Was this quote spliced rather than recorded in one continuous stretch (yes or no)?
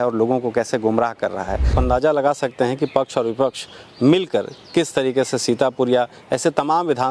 yes